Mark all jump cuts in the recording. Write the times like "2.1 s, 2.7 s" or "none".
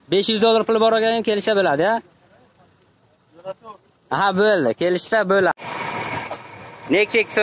5.5 s